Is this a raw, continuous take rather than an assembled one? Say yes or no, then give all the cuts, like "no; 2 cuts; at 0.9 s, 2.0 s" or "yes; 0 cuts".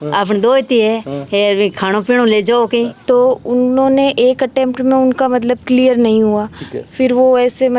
no; 1 cut; at 2.9 s